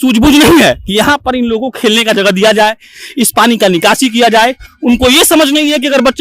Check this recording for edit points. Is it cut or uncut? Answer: uncut